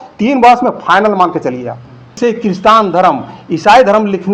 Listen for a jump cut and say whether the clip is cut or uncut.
cut